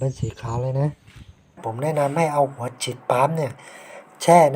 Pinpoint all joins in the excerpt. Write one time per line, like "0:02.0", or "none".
0:01.7